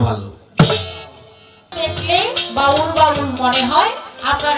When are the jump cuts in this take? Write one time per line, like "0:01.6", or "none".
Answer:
0:01.7